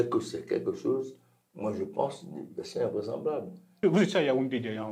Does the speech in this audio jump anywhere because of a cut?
yes; 1 cut; at 3.6 s

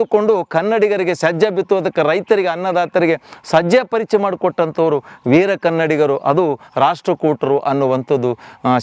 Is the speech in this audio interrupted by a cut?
no; 0 cuts

